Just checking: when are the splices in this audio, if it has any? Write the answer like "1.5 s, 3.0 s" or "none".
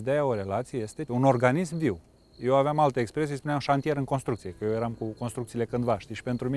1.1 s